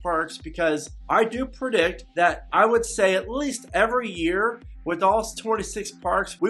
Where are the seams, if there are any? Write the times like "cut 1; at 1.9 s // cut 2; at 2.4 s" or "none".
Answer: cut 1; at 0.9 s // cut 2; at 2.0 s

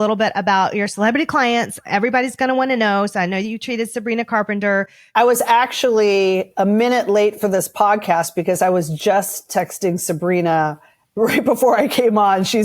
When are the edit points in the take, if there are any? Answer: cut 1; at 5.1 s

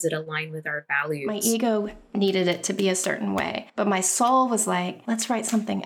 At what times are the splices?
cut 1; at 1.3 s // cut 2; at 3.6 s // cut 3; at 5.0 s

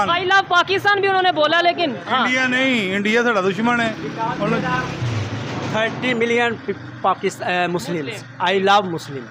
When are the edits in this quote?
none

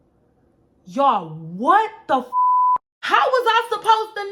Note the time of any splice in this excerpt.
none

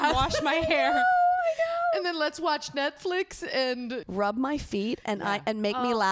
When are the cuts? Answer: cut 1; at 4.0 s

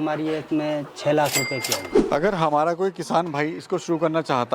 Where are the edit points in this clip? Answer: cut 1; at 1.9 s

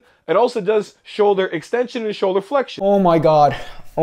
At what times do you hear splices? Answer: cut 1; at 2.7 s

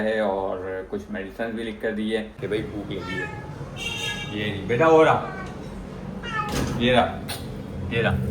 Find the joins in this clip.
cut 1; at 2.3 s

